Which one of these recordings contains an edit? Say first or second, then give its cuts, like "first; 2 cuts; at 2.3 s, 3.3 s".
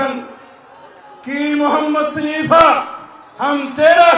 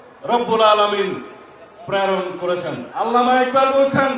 second; 1 cut; at 2.8 s